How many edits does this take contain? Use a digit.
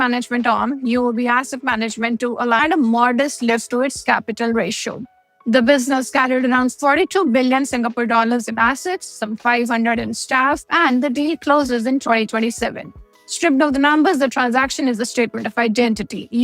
1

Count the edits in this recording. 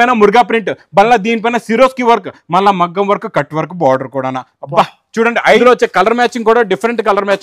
1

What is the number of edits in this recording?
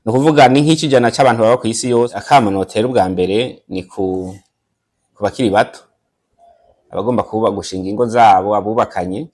1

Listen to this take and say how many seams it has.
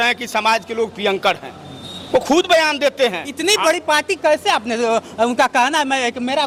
0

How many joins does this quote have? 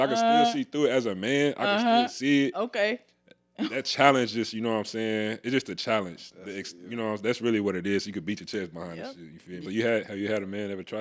1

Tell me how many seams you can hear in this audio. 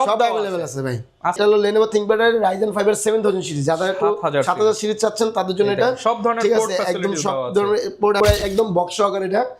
2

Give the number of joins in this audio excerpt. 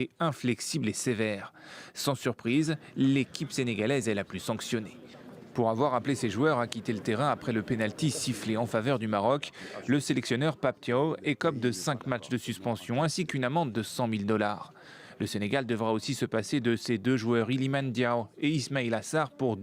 1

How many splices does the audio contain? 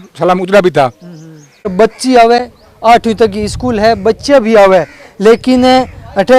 1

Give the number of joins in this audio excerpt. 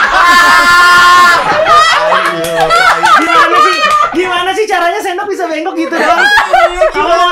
1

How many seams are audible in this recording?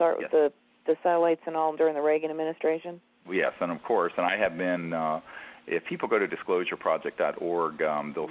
1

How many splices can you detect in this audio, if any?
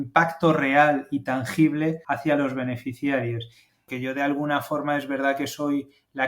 2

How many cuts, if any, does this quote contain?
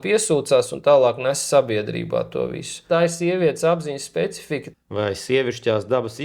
2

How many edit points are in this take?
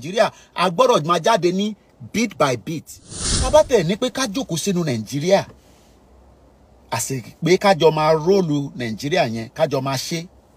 1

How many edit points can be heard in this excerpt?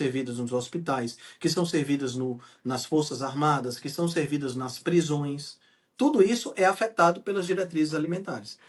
0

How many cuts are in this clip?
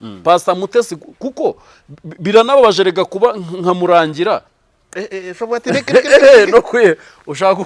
1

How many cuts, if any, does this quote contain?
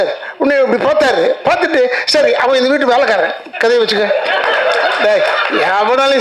0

